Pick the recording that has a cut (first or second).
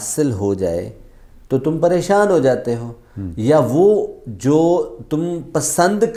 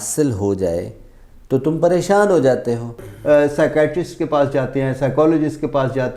second